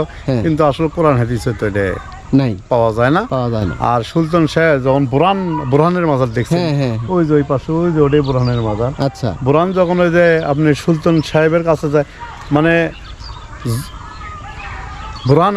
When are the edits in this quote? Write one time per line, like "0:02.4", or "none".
none